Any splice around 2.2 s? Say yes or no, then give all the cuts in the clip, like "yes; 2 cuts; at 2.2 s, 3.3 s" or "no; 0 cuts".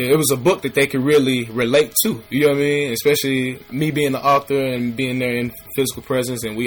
no; 2 cuts; at 3.6 s, 5.7 s